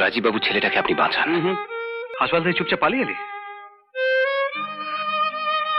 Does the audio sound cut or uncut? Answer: cut